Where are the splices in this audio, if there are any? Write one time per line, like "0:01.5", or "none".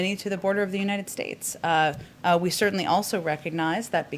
0:02.1